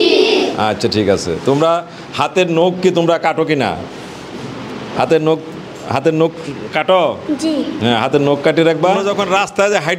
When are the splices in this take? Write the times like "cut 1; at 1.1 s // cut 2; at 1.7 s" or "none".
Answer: cut 1; at 9.1 s

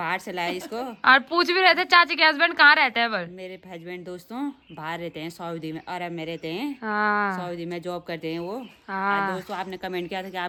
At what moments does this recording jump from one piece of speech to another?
none

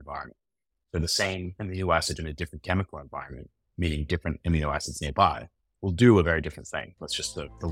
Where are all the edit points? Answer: none

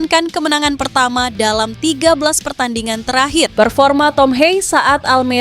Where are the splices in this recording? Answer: cut 1; at 3.5 s

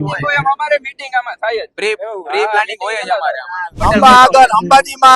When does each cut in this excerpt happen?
cut 1; at 3.7 s

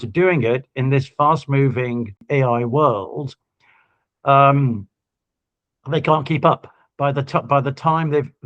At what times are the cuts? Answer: cut 1; at 2.2 s

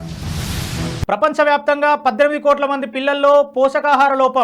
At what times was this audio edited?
cut 1; at 1.0 s

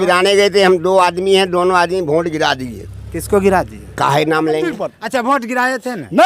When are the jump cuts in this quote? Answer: cut 1; at 4.9 s

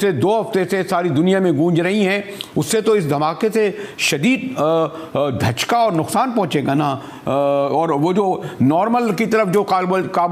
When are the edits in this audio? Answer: none

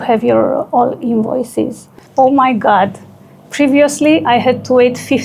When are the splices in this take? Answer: cut 1; at 2.0 s

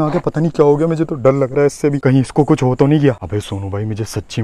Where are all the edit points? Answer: none

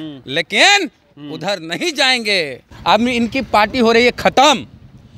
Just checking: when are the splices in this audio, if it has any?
cut 1; at 2.7 s

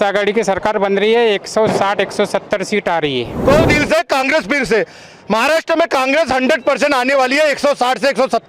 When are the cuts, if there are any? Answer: cut 1; at 3.3 s

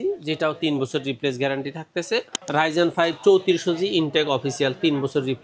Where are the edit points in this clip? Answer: cut 1; at 2.4 s

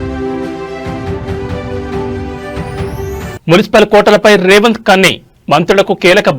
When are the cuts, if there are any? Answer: cut 1; at 2.1 s

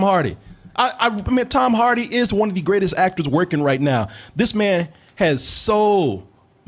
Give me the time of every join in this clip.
none

